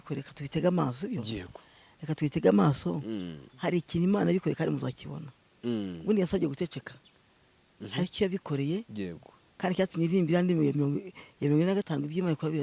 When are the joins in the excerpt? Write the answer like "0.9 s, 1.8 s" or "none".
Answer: none

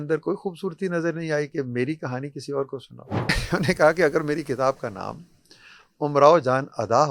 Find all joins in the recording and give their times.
3.4 s

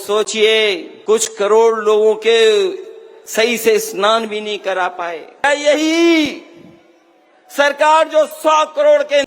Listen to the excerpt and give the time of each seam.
0.9 s, 5.4 s

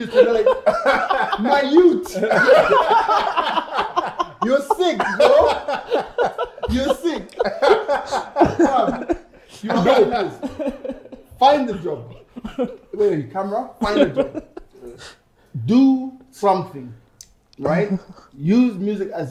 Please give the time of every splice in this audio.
none

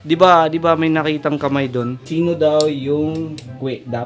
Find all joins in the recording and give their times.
2.0 s

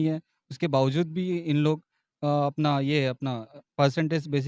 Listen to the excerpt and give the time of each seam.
none

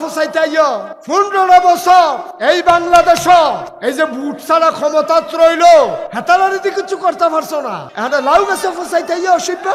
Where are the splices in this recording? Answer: 0.9 s, 2.3 s, 3.7 s, 6.1 s, 7.8 s

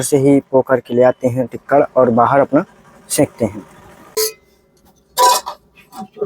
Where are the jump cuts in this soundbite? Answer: 4.1 s

